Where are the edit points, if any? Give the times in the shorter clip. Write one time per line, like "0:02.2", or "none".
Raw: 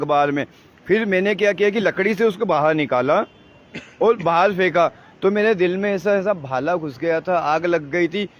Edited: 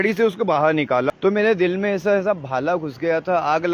0:01.1